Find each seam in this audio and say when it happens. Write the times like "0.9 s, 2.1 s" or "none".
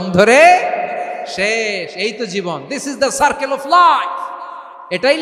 none